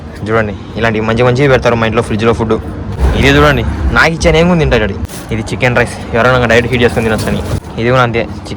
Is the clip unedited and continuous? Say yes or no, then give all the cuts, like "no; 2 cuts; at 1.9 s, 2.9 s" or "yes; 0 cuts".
no; 3 cuts; at 3.0 s, 5.0 s, 7.6 s